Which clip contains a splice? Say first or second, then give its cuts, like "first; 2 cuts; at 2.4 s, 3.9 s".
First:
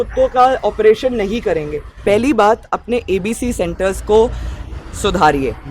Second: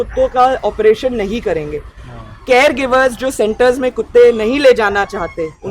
first; 1 cut; at 1.9 s